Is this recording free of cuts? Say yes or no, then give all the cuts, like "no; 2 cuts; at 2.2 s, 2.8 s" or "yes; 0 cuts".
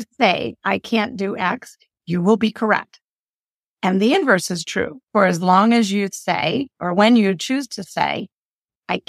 yes; 0 cuts